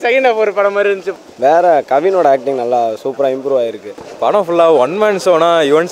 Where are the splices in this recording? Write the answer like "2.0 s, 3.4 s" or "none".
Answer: 1.1 s, 4.1 s